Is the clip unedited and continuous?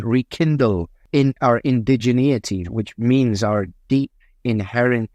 no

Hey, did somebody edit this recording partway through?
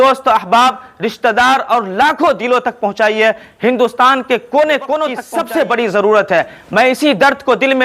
yes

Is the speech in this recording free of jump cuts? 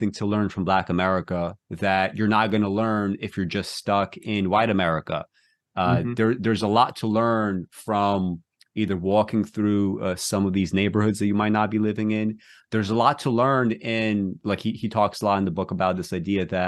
yes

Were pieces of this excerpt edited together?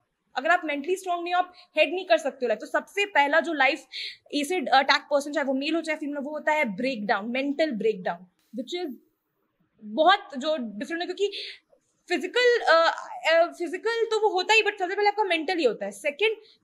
no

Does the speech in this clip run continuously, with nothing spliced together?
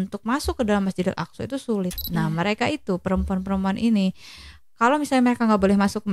no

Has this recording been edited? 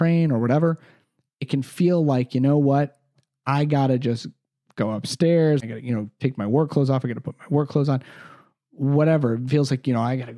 yes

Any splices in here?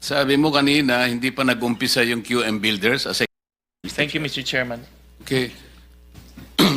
yes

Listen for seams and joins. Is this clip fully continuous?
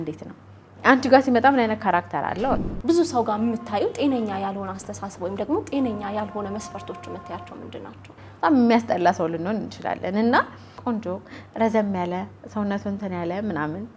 no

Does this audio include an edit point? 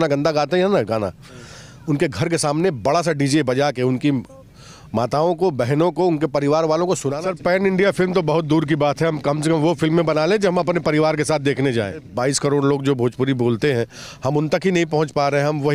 yes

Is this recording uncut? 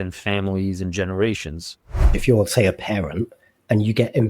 no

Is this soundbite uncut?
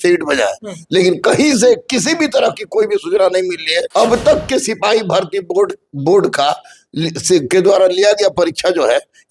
no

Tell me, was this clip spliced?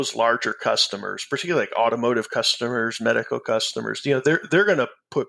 no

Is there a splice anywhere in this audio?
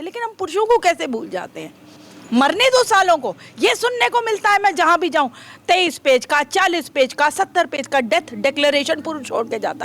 no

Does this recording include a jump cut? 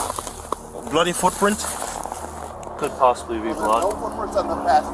yes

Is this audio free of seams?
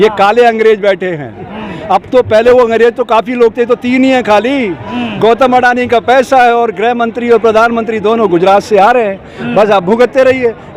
yes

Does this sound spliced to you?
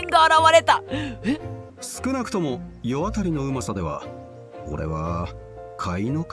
yes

